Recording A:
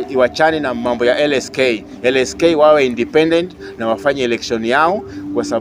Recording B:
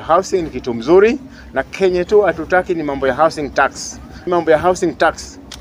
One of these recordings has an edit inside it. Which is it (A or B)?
B